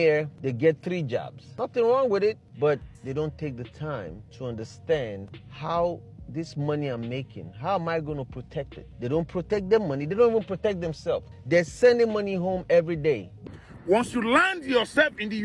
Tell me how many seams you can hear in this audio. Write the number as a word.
one